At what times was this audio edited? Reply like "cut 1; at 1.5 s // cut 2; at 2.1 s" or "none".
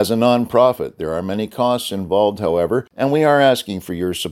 cut 1; at 2.9 s

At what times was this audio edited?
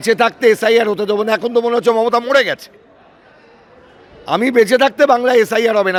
none

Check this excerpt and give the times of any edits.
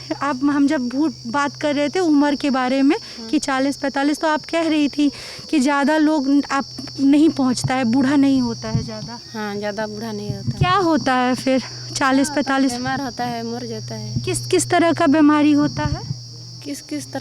none

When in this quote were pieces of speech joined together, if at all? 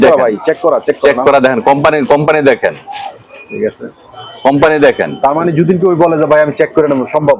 none

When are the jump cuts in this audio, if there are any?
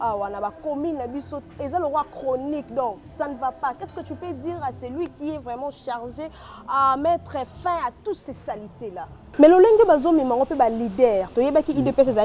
cut 1; at 9.3 s

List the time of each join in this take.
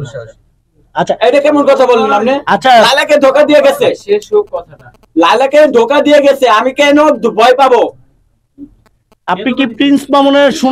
none

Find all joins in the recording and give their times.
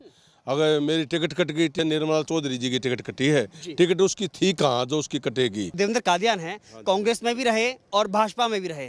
cut 1; at 1.7 s // cut 2; at 5.7 s

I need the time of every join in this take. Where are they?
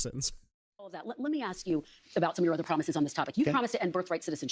cut 1; at 1.0 s

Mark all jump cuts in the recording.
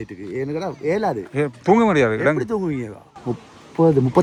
none

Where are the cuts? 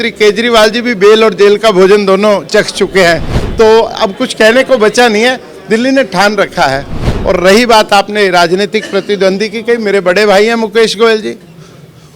cut 1; at 7.1 s

